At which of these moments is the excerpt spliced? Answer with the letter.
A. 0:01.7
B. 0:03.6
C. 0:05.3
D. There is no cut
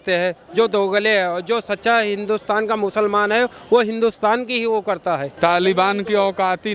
C